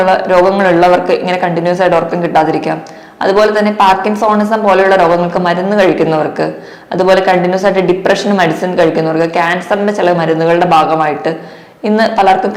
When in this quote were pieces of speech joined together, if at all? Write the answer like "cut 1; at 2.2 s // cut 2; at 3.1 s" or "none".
none